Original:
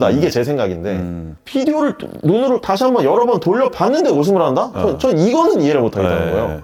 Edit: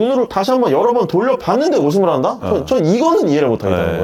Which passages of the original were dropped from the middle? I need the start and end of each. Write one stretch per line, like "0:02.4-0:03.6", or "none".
none